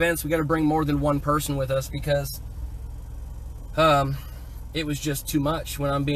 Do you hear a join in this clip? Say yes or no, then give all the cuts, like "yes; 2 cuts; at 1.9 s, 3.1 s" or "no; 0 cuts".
no; 0 cuts